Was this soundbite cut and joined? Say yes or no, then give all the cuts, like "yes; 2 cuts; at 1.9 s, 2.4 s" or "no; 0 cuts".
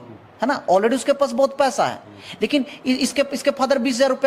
no; 0 cuts